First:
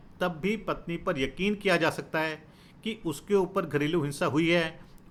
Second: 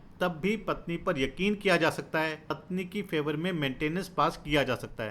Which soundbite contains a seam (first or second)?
second